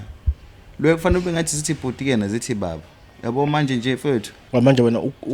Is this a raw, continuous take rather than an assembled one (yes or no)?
no